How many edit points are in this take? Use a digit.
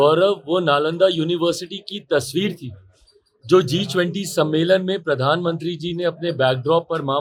0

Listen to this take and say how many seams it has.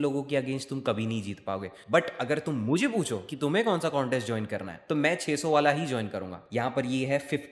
2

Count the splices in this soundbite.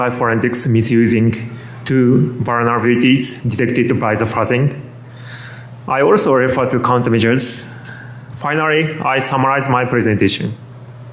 0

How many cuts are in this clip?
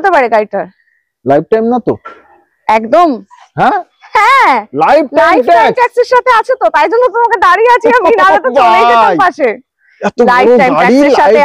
0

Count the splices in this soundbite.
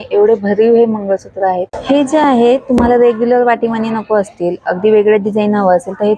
1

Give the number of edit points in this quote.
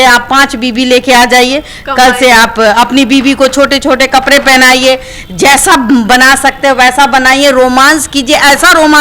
0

